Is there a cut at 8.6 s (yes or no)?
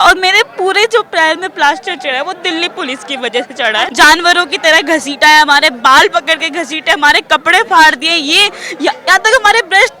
no